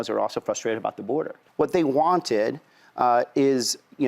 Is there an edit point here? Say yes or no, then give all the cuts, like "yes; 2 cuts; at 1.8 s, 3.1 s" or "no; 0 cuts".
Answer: yes; 1 cut; at 1.4 s